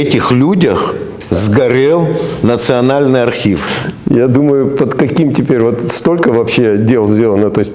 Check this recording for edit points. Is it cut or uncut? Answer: cut